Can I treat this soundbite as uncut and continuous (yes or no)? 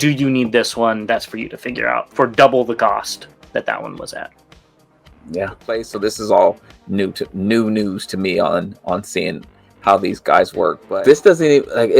no